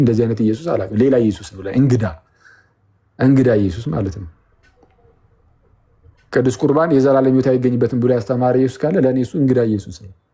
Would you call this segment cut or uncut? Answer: uncut